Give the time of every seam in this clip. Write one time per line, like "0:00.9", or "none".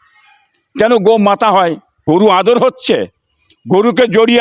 0:01.9